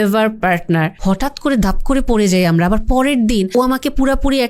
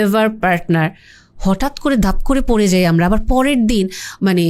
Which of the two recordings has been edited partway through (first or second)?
first